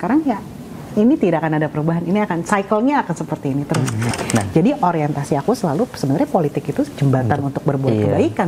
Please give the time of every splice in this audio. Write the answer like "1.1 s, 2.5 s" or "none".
4.1 s